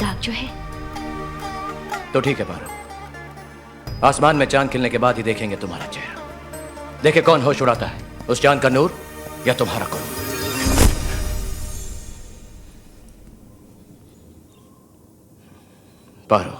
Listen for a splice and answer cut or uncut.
uncut